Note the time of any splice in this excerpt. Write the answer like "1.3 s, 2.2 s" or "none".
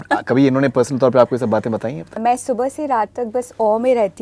2.2 s